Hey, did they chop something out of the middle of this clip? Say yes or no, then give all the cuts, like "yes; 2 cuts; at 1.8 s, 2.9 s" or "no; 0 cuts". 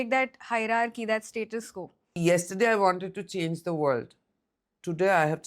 yes; 1 cut; at 2.2 s